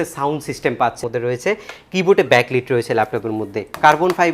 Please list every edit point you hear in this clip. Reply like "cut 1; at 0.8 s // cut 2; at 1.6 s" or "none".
cut 1; at 1.0 s